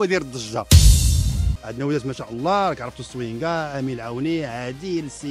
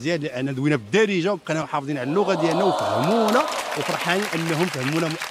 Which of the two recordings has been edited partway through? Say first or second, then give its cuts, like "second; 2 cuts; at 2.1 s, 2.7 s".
first; 1 cut; at 1.6 s